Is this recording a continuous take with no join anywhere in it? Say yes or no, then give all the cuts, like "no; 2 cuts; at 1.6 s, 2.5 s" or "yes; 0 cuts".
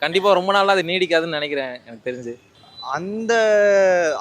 yes; 0 cuts